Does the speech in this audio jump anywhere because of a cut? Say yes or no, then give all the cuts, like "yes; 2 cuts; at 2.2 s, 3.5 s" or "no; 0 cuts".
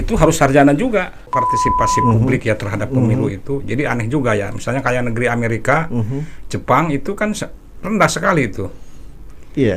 yes; 1 cut; at 1.4 s